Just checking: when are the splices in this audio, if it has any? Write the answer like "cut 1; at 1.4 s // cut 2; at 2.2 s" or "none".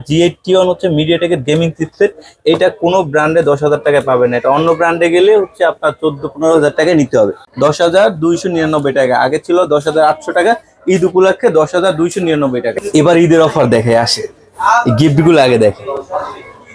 cut 1; at 7.4 s // cut 2; at 12.7 s